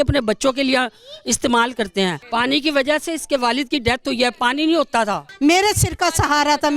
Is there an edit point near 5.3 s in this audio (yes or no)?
yes